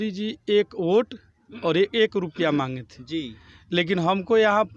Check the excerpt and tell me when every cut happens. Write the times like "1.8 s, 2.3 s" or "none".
none